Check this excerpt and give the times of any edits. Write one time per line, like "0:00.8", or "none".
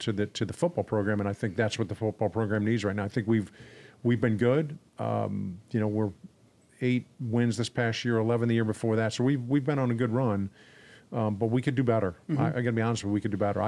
none